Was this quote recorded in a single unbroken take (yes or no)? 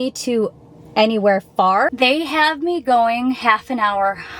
no